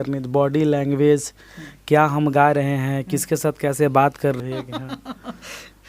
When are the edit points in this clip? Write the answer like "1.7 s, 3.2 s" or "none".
4.4 s